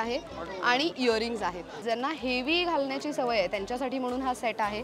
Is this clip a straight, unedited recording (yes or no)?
no